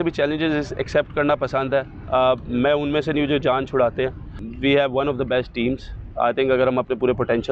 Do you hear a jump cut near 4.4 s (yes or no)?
yes